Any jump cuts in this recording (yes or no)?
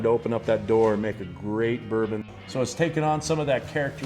yes